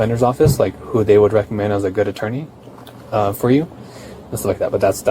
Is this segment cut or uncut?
uncut